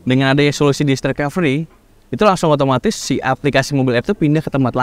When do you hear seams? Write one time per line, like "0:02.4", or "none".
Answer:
none